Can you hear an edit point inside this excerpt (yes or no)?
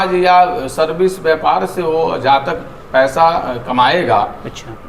no